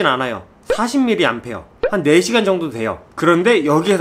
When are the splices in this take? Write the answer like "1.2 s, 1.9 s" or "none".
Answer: 1.7 s, 3.1 s